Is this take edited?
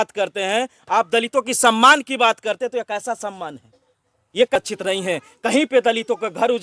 yes; 1 cut; at 4.6 s

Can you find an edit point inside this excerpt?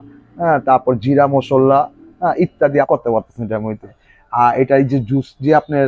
yes; 2 cuts; at 2.9 s, 4.1 s

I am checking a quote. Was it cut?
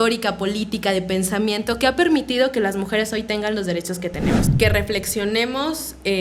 yes; 1 cut; at 4.4 s

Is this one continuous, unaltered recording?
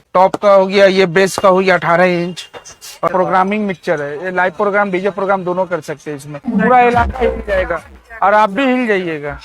no; 2 cuts; at 3.1 s, 6.4 s

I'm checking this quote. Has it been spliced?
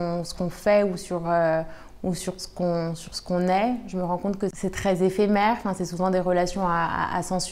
no; 0 cuts

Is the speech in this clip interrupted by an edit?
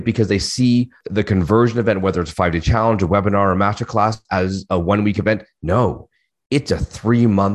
yes; 2 cuts; at 1.0 s, 4.2 s

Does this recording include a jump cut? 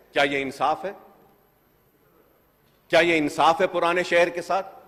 no; 0 cuts

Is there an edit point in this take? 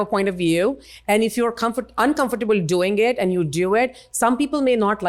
no; 0 cuts

